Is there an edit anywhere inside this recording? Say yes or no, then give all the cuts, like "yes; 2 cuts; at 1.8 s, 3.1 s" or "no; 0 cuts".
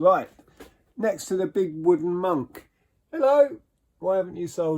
no; 0 cuts